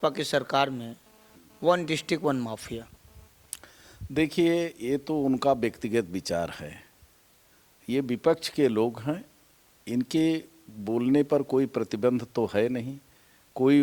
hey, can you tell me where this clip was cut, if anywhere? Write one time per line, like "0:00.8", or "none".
none